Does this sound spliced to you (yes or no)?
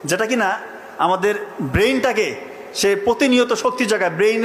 no